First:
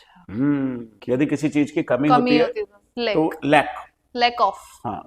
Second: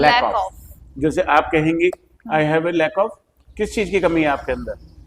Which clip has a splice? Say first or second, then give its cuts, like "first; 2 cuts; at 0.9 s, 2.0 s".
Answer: first; 1 cut; at 0.9 s